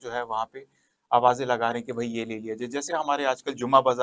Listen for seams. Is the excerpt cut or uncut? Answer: uncut